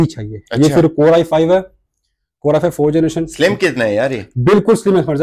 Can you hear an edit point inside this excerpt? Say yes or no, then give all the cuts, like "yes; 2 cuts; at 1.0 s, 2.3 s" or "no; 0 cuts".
no; 0 cuts